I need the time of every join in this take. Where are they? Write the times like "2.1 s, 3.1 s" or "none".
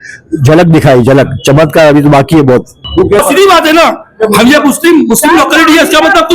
3.0 s